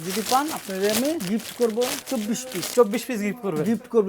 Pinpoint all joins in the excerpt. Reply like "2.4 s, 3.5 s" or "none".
1.2 s, 2.2 s